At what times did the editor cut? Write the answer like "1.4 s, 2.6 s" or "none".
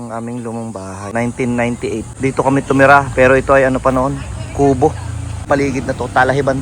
1.1 s, 2.1 s, 5.5 s

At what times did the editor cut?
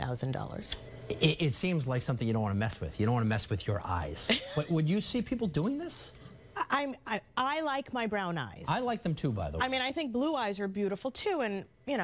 none

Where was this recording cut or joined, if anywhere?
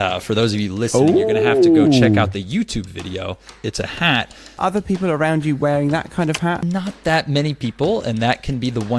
3.5 s, 4.6 s, 6.6 s

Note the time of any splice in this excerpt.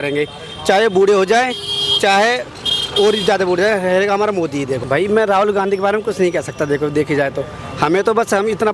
4.8 s

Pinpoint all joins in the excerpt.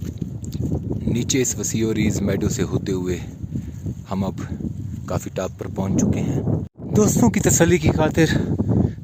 6.7 s

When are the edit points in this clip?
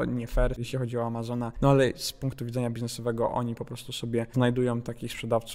none

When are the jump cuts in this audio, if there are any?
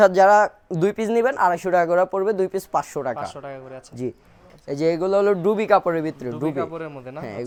none

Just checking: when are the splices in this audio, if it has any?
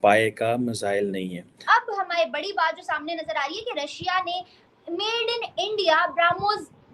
1.5 s

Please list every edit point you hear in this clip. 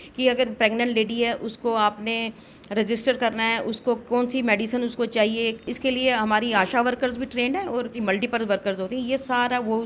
5.6 s, 8.0 s

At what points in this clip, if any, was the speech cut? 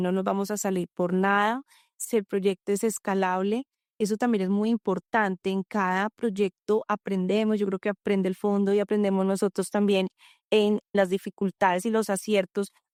none

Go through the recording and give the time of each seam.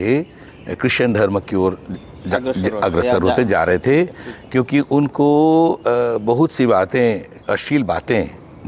none

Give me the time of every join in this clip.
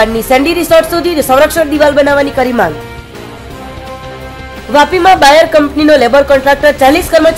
none

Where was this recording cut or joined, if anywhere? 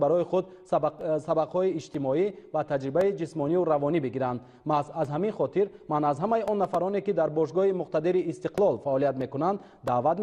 5.5 s

